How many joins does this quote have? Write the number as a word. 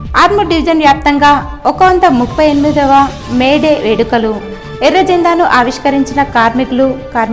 zero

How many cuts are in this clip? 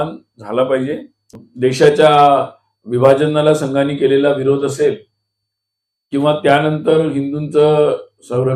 one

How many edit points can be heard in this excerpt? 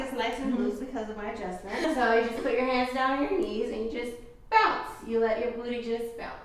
one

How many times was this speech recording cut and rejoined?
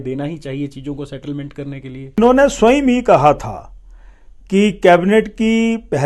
one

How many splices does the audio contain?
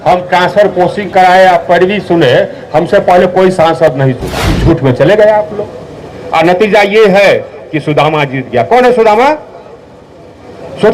one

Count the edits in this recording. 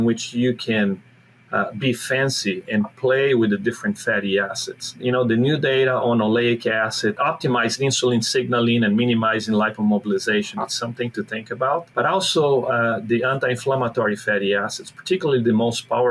three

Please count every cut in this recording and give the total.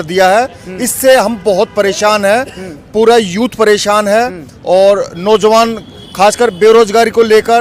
zero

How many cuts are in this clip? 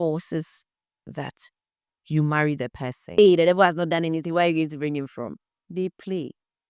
one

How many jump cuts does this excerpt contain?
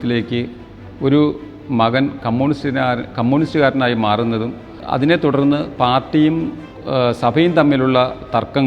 one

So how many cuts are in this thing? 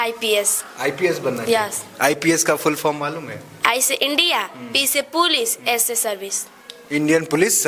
zero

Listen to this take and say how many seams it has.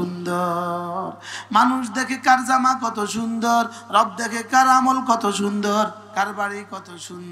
one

